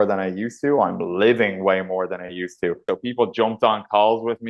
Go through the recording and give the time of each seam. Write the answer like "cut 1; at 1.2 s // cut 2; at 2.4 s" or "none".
cut 1; at 2.8 s

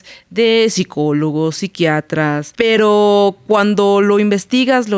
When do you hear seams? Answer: cut 1; at 2.5 s

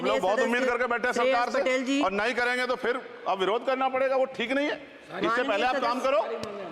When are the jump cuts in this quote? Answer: none

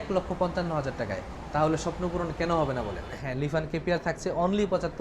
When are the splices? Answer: cut 1; at 3.2 s

